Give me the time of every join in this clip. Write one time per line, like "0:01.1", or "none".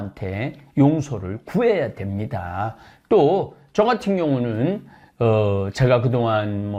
none

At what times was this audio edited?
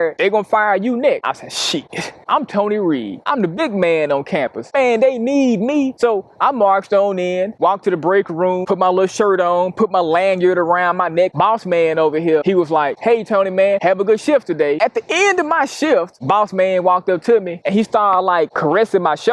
0:11.3
0:14.8

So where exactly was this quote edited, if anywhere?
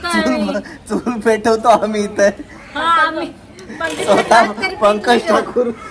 none

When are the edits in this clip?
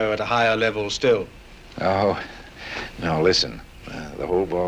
none

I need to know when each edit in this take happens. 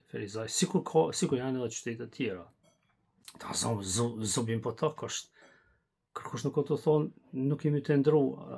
none

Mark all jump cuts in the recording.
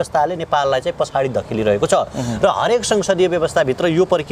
none

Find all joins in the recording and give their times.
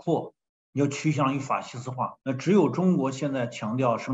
0:02.2

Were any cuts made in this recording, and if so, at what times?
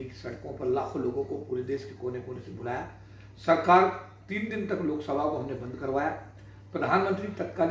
none

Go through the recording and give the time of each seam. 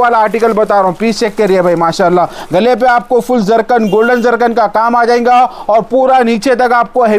none

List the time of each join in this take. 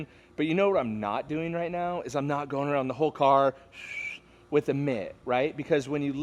none

